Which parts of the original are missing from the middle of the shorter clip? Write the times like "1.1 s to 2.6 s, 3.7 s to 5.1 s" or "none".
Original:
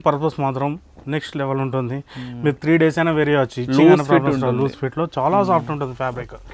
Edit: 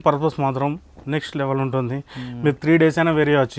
none